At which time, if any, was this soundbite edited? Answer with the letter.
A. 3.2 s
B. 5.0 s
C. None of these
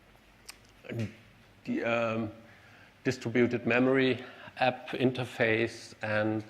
B